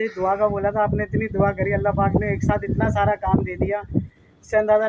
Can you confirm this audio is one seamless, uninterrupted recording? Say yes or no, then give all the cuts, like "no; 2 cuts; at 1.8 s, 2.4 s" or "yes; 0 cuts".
yes; 0 cuts